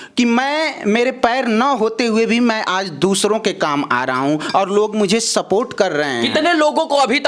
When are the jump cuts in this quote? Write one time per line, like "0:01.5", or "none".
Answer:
none